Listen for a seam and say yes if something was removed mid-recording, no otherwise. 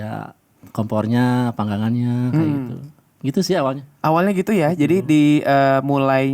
no